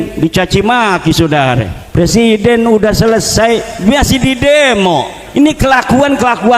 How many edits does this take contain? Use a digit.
2